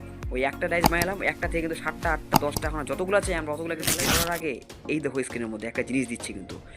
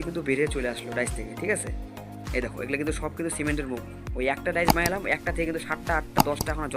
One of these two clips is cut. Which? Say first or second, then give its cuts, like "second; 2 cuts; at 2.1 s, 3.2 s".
first; 1 cut; at 4.0 s